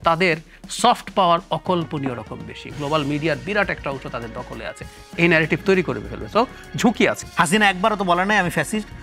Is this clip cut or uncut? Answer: cut